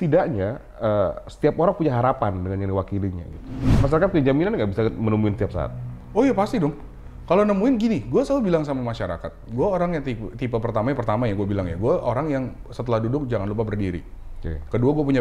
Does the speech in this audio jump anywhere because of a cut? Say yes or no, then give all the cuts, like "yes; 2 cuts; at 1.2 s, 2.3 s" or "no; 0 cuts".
yes; 1 cut; at 3.6 s